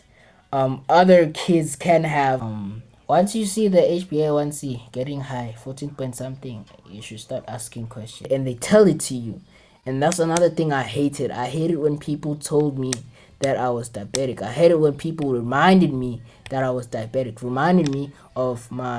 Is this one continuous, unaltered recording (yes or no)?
no